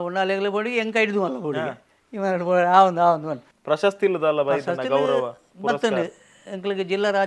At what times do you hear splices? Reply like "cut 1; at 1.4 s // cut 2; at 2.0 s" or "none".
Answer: cut 1; at 3.5 s